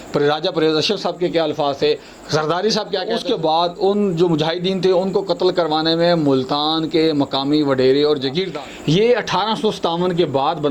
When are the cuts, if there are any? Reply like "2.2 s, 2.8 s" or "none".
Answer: 3.2 s, 8.5 s